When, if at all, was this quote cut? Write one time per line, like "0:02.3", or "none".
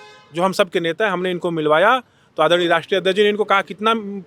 none